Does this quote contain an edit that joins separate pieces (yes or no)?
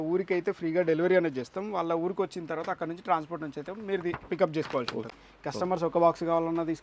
yes